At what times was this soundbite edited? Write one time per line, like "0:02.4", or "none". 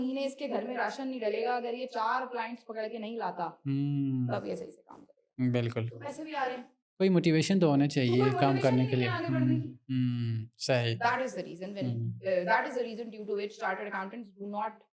none